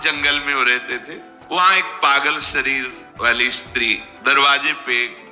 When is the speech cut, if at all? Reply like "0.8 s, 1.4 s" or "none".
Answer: 1.5 s, 3.0 s, 4.1 s